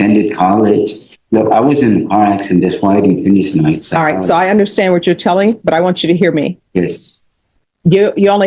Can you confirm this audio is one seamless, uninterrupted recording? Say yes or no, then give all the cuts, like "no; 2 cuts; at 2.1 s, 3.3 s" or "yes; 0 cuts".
yes; 0 cuts